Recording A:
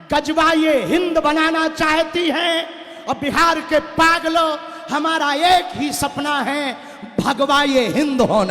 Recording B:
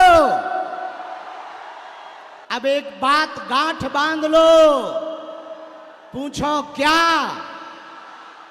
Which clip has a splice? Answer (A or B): B